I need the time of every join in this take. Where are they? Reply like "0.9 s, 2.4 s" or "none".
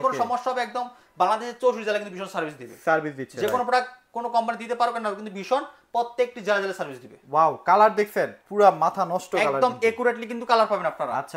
none